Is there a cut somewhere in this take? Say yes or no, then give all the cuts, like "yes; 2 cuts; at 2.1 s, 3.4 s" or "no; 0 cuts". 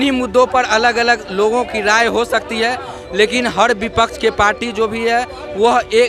no; 0 cuts